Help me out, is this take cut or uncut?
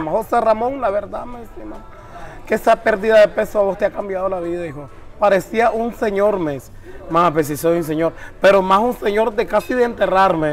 uncut